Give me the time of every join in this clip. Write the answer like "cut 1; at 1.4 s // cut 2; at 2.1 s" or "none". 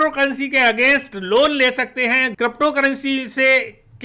cut 1; at 2.3 s